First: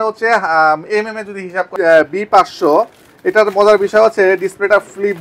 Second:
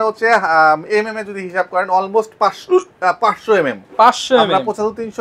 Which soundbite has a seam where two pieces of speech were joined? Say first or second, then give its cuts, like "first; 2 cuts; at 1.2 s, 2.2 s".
first; 1 cut; at 1.6 s